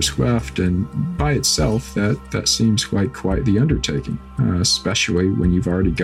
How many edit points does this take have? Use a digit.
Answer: 1